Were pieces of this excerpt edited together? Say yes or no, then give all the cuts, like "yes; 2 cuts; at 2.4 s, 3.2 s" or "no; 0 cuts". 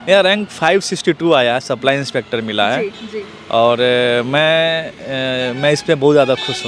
no; 0 cuts